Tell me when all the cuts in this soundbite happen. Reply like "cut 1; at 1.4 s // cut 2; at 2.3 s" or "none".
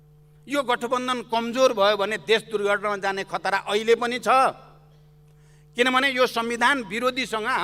none